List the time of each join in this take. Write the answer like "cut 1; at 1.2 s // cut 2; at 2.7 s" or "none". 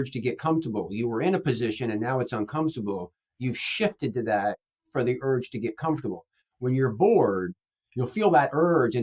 none

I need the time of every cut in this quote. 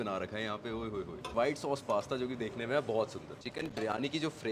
cut 1; at 1.3 s // cut 2; at 3.4 s

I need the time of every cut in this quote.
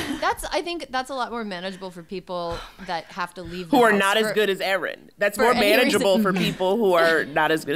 none

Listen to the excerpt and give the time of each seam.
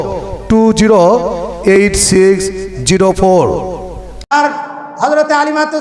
cut 1; at 4.3 s

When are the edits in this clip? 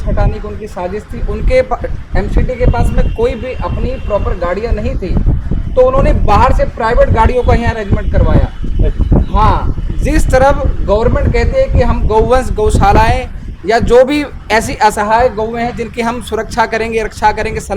none

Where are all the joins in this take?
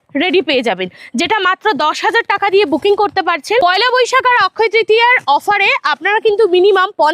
cut 1; at 3.6 s

